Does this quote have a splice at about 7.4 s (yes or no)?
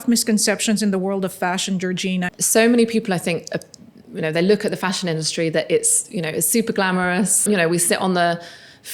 yes